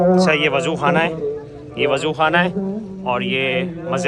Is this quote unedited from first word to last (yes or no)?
yes